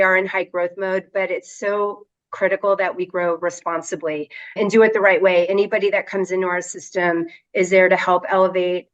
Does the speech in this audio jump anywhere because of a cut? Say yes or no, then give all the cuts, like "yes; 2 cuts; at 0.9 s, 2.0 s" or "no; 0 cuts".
yes; 1 cut; at 4.6 s